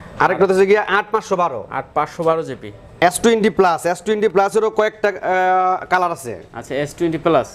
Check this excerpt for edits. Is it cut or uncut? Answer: cut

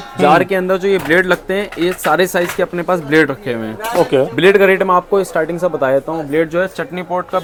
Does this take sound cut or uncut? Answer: uncut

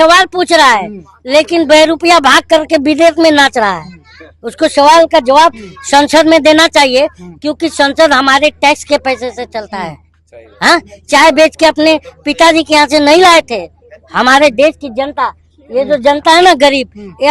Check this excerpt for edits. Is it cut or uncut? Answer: uncut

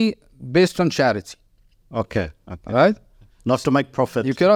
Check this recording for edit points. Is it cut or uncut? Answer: uncut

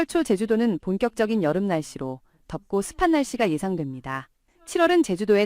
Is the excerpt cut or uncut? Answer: cut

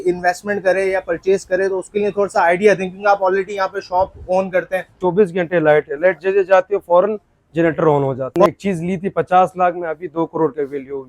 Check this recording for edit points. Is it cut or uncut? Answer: cut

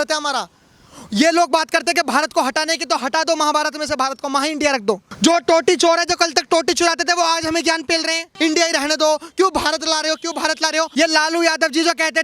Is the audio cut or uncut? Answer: cut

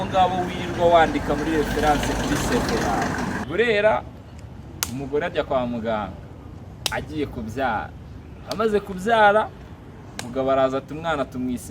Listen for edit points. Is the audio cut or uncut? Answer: cut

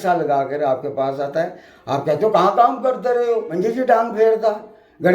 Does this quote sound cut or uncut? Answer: cut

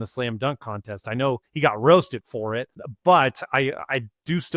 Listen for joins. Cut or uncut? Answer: cut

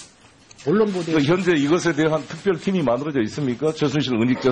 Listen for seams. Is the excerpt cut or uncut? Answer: uncut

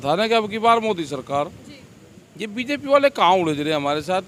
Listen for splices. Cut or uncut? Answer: uncut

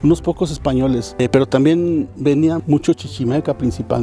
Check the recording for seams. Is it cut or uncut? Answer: uncut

